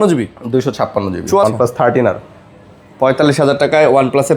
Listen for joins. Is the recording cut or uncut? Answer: cut